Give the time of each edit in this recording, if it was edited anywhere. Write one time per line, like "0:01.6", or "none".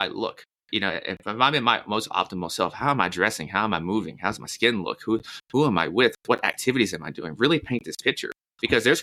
none

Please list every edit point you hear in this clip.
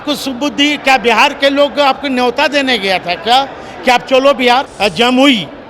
0:04.7

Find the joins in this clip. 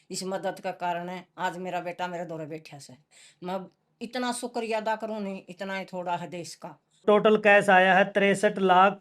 0:07.0

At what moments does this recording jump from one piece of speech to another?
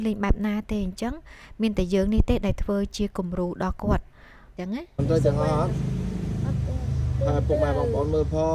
0:04.5

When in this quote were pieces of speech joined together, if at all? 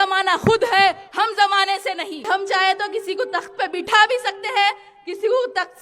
0:02.2

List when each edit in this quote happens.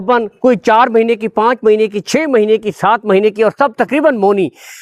none

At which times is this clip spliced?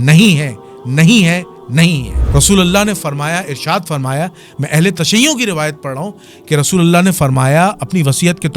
0:02.2

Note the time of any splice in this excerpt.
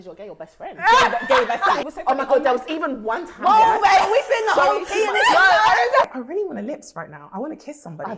0:01.8
0:06.0

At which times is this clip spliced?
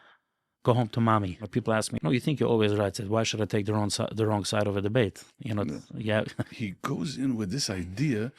0:01.6
0:06.5

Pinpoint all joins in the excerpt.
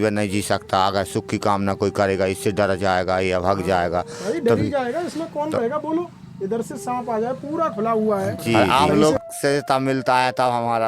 0:08.6

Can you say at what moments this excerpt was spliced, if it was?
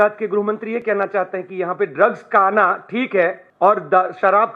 0:03.4

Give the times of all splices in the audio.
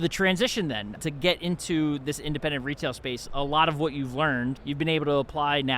0:01.0
0:04.7

